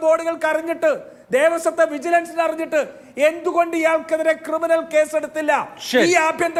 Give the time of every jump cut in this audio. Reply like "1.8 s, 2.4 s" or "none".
none